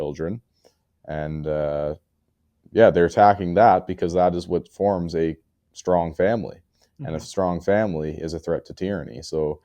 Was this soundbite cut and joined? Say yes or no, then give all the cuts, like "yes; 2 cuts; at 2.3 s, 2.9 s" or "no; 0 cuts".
no; 0 cuts